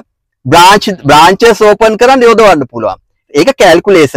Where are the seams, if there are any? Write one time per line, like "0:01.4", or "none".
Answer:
none